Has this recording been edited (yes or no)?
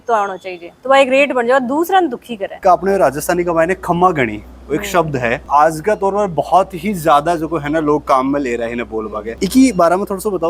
yes